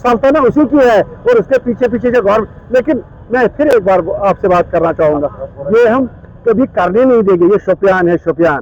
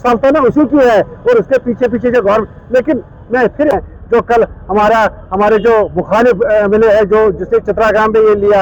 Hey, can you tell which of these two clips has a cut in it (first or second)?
second